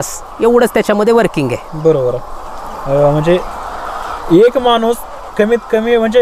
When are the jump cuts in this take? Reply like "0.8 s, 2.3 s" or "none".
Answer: none